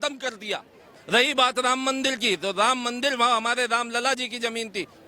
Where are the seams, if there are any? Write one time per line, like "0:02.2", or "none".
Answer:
0:00.9